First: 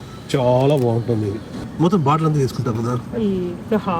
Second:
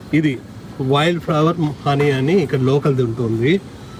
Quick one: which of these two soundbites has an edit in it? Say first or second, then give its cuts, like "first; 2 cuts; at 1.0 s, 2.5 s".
first; 1 cut; at 1.6 s